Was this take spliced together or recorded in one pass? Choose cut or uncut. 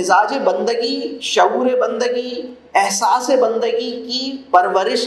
uncut